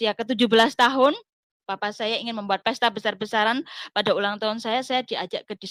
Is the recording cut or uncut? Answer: uncut